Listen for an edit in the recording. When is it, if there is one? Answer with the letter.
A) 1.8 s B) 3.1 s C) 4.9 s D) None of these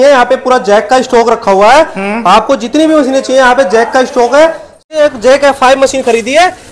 C